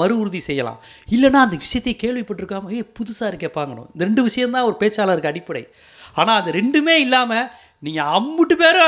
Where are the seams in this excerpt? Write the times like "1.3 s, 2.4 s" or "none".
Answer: none